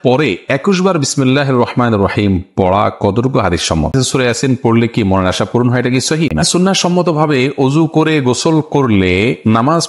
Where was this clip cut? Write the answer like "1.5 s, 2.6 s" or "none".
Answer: 3.9 s, 6.4 s